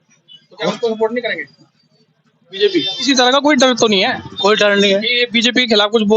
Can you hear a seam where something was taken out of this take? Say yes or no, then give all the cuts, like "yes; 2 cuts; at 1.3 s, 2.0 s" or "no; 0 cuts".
yes; 1 cut; at 2.9 s